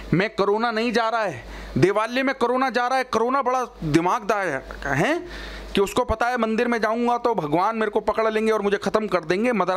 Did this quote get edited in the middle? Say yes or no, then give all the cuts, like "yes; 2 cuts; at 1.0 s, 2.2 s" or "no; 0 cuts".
no; 0 cuts